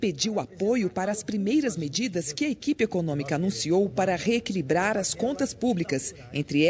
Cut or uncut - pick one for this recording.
cut